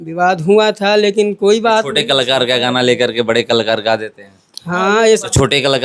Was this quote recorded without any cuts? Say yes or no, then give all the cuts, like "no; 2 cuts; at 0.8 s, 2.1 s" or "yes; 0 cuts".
yes; 0 cuts